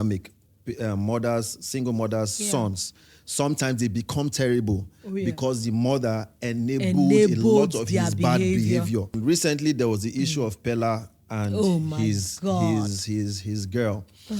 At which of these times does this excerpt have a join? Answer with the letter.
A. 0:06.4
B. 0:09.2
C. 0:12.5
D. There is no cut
B